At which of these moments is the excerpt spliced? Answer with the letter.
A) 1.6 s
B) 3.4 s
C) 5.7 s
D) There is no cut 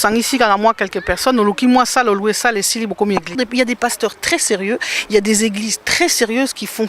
B